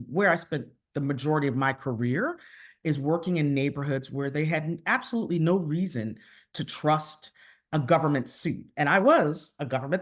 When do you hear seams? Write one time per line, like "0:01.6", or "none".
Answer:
none